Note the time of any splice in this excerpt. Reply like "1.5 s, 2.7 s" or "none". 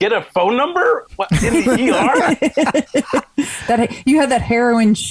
none